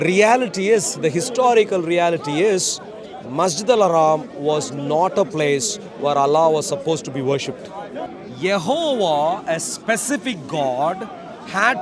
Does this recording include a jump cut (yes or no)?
yes